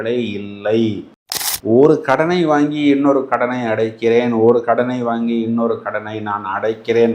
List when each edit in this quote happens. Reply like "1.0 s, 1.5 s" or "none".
1.4 s